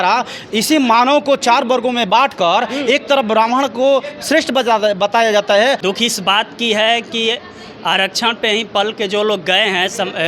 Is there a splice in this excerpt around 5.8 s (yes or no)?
yes